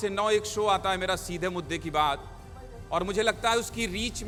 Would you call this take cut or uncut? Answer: uncut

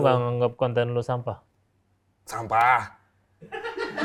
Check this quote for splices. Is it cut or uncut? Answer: uncut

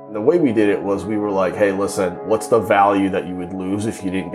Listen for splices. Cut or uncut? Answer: uncut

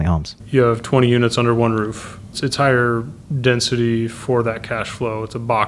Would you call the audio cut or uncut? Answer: cut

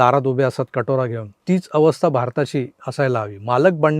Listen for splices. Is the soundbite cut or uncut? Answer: cut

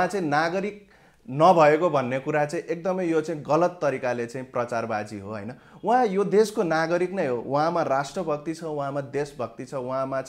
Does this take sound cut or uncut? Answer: uncut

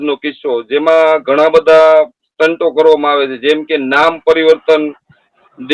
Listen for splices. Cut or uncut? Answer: uncut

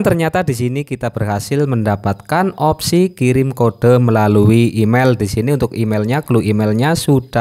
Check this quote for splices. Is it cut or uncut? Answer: uncut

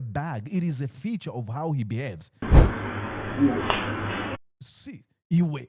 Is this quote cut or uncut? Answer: cut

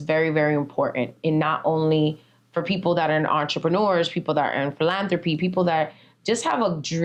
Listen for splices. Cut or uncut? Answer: uncut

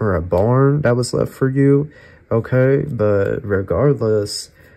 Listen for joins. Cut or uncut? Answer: uncut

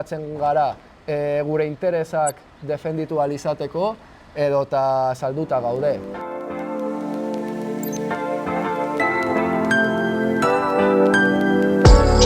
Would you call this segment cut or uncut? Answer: cut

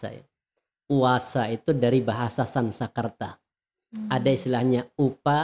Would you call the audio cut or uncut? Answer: uncut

